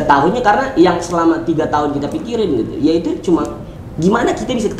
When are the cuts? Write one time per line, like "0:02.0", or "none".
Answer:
none